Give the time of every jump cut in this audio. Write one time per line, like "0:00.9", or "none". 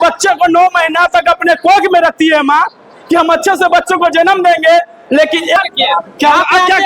0:05.6

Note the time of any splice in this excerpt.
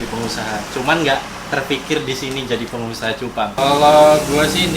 0:03.5

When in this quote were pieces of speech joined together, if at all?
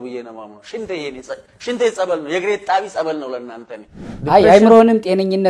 0:04.1

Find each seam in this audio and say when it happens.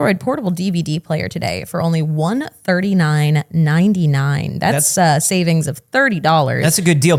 none

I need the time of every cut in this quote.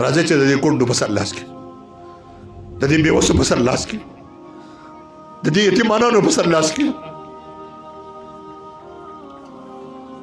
0:01.3
0:02.8
0:04.0
0:05.4
0:06.9

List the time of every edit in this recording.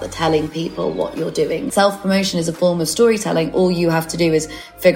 0:01.7

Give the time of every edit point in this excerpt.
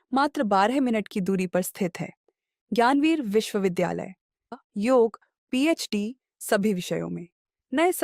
0:04.5

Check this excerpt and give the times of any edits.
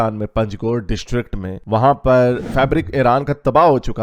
0:02.4

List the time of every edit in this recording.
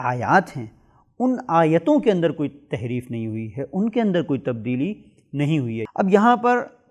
0:05.8

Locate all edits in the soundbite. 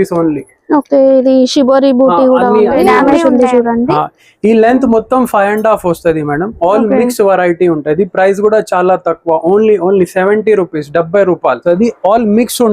0:03.0
0:11.6

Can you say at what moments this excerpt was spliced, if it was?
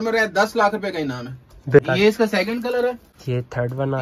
0:01.8
0:03.1

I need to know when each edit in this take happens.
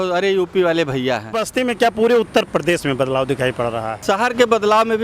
0:01.4
0:03.9

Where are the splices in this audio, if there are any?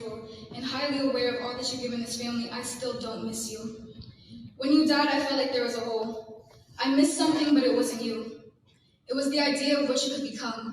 0:03.8

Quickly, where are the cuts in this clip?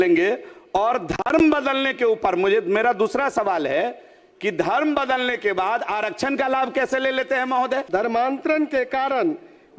0:07.8

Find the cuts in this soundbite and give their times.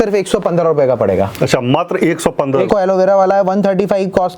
0:02.7

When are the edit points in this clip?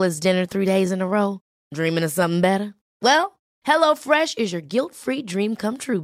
none

